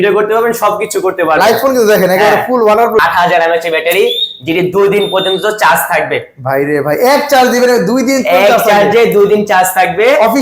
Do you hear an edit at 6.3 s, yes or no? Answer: no